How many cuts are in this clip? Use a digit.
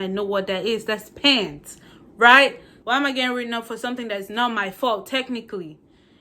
1